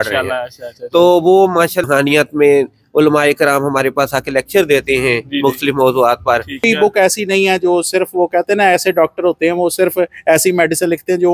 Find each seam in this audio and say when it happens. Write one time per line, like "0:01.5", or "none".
0:01.9
0:06.7